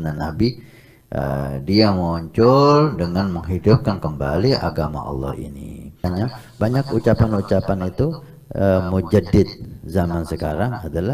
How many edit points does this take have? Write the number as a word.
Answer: one